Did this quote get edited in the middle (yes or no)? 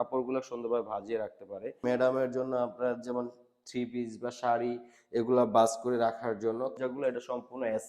yes